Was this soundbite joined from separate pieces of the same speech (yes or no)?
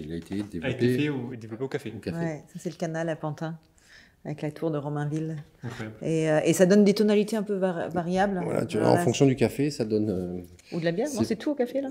no